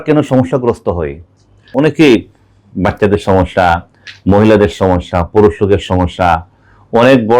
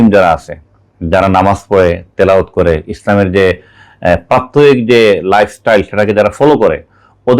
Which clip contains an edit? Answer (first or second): first